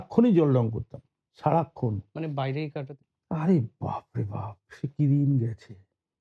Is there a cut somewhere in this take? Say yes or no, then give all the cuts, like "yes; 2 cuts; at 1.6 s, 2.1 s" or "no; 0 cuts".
yes; 1 cut; at 2.8 s